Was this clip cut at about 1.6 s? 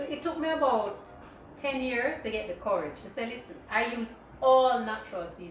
no; 1 cut; at 3.5 s

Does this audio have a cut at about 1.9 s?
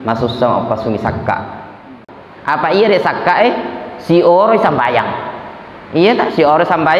yes; 1 cut; at 1.9 s

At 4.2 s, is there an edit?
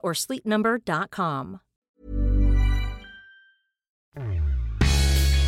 yes; 1 cut; at 4.2 s

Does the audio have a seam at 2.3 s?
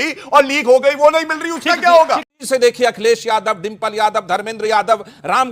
yes; 1 cut; at 2.3 s

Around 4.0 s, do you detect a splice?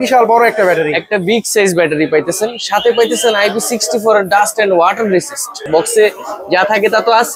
no; 1 cut; at 5.6 s

